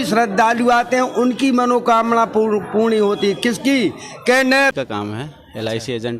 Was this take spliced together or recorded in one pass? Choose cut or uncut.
cut